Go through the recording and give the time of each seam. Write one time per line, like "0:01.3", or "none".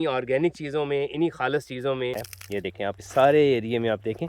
0:02.3